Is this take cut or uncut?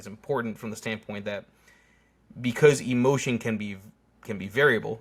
uncut